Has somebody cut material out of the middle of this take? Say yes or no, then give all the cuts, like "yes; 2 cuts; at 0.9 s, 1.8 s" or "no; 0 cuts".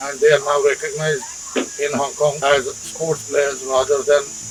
no; 0 cuts